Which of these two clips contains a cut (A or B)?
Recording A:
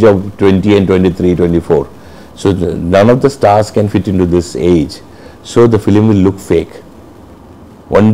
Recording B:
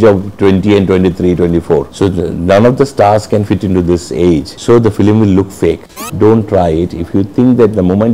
B